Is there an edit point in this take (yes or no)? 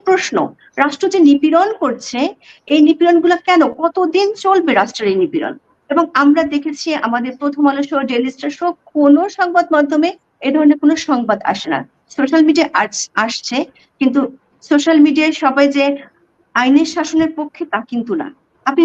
no